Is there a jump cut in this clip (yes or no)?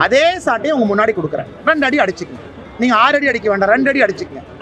no